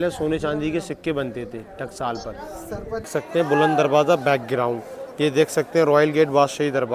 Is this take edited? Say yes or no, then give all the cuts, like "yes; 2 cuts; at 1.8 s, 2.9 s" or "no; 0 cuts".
yes; 1 cut; at 3.1 s